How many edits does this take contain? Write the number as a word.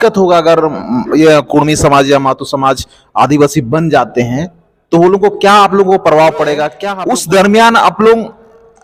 one